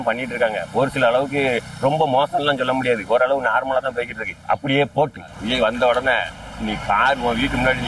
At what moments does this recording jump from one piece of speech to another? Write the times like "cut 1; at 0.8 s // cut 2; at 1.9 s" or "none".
cut 1; at 5.4 s

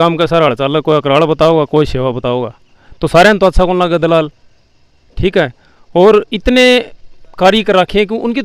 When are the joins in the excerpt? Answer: none

